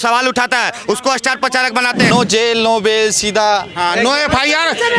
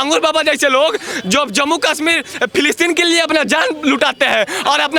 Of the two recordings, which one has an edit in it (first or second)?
first